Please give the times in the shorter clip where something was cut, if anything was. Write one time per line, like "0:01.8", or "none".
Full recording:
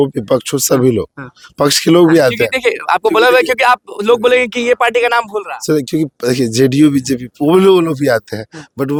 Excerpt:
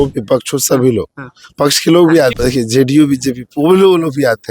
0:02.4